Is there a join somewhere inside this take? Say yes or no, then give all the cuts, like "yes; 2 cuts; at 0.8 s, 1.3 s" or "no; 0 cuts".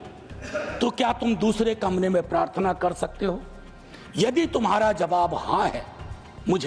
no; 0 cuts